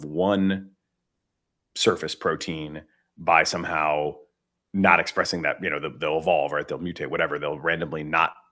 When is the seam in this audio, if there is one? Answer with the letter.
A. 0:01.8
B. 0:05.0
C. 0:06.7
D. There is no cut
D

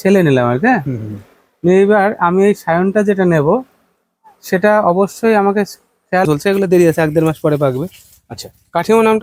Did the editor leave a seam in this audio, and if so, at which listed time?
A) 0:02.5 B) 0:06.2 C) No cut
B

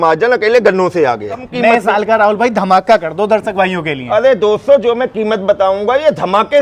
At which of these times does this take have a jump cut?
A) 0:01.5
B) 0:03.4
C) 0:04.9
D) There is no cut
A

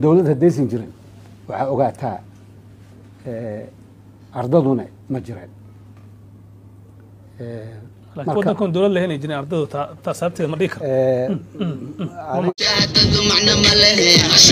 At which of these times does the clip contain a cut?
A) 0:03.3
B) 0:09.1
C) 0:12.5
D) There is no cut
C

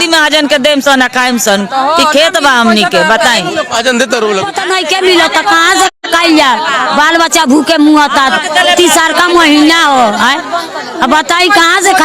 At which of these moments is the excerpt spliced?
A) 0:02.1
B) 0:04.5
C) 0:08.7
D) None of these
B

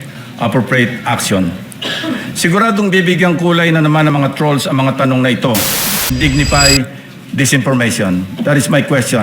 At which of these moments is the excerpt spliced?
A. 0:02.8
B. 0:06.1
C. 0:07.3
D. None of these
B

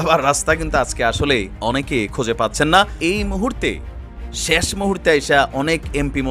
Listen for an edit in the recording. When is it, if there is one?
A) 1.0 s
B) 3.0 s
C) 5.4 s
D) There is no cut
B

